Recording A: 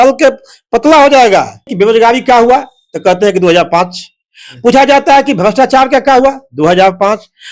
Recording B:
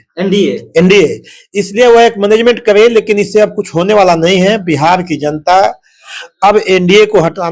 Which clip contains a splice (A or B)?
A